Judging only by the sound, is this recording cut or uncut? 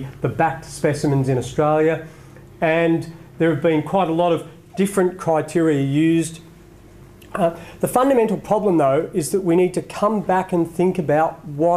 cut